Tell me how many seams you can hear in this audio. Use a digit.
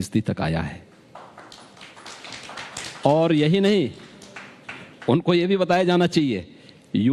0